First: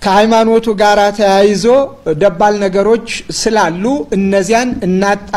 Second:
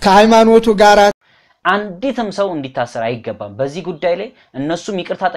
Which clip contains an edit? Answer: second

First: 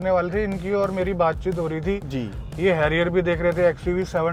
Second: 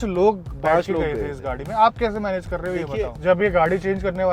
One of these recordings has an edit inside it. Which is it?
second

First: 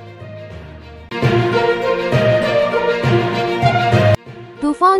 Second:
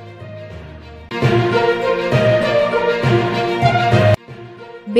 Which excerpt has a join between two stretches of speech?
first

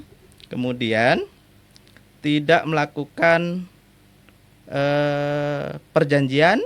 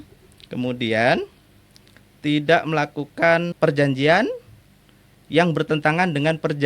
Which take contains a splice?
second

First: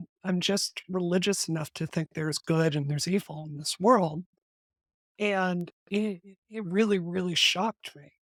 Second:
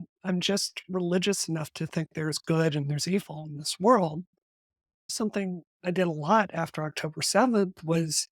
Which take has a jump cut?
second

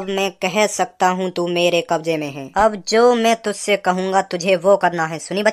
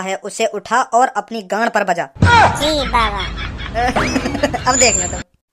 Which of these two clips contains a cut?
first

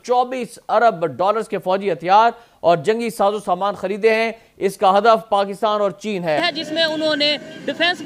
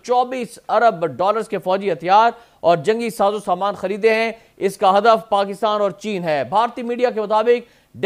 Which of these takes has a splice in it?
first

